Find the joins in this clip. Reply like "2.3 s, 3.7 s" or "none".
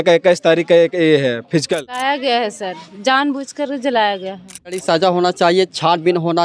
2.0 s, 4.7 s

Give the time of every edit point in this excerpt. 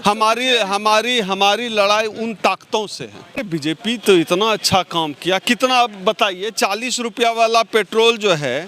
3.4 s

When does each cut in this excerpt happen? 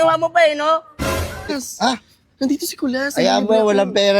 1.6 s

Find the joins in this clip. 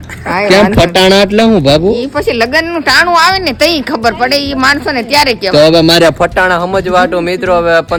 none

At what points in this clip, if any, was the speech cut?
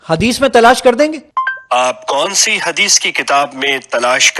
1.2 s

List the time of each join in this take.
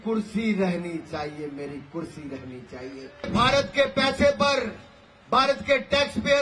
3.3 s

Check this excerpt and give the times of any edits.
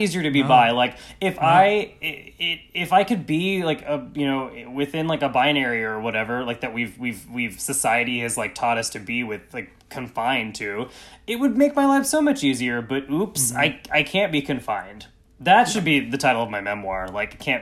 none

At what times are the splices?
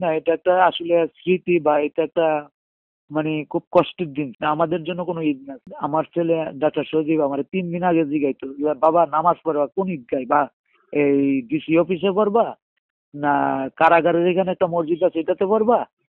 4.3 s, 5.7 s

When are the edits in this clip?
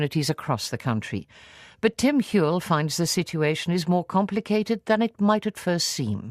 5.1 s

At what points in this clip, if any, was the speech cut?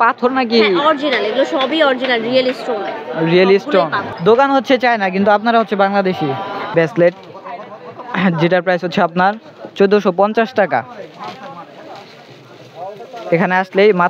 4.1 s, 6.7 s

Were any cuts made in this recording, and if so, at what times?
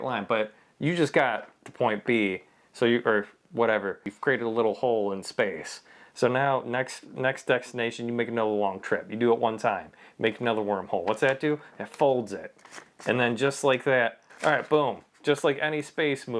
4.1 s, 14.2 s

